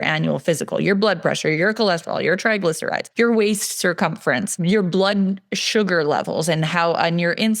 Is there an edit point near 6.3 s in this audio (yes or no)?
no